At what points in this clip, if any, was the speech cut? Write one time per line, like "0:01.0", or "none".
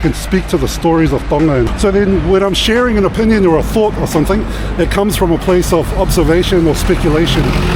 0:01.7